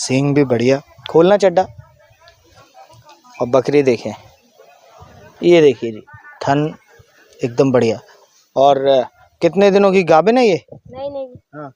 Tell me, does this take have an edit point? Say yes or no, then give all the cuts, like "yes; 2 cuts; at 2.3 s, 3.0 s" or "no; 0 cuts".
no; 0 cuts